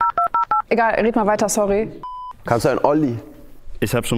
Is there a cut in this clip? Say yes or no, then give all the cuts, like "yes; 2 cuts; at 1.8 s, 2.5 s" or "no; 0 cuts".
yes; 1 cut; at 2.0 s